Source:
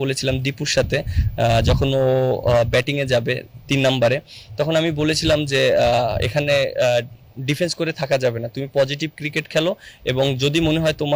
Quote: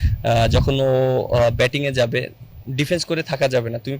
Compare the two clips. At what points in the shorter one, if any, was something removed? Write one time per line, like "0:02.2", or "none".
0:02.4